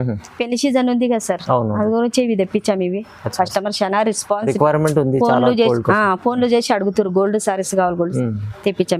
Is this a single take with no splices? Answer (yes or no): yes